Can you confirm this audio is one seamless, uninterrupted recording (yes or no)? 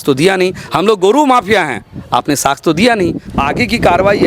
no